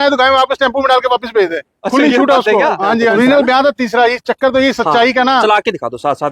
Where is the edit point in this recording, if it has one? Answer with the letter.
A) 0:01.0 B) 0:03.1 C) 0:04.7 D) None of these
B